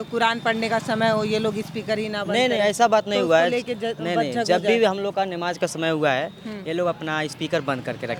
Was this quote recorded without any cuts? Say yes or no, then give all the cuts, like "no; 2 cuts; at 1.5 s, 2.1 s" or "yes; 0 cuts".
yes; 0 cuts